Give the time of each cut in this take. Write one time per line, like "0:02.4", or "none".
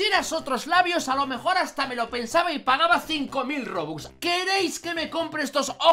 0:04.0